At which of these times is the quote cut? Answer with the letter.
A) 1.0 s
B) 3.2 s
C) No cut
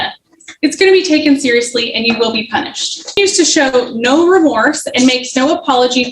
B